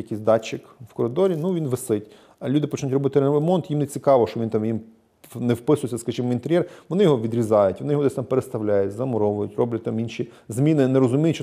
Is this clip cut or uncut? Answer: uncut